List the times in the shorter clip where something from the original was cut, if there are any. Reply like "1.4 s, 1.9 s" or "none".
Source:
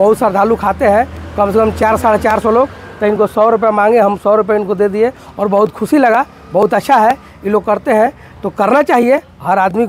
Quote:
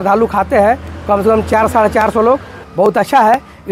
2.6 s